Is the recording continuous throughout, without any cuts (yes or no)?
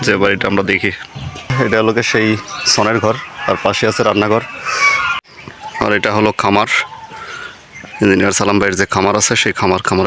no